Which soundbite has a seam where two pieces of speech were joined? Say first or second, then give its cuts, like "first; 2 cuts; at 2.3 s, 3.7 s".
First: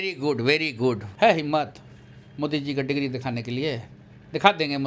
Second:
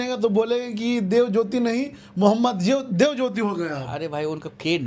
first; 1 cut; at 1.1 s